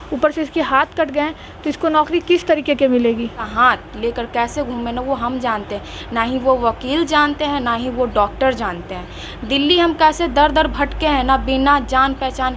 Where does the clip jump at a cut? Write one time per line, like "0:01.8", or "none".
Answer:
0:03.5